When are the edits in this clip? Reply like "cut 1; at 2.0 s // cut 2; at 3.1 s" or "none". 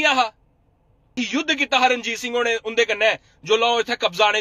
cut 1; at 1.2 s